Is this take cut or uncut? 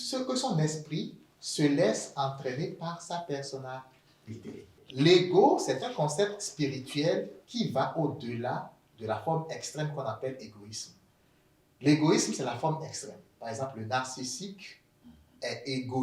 cut